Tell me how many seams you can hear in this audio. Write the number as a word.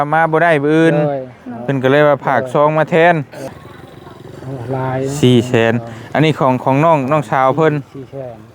one